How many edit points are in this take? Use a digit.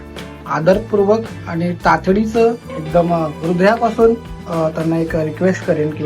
1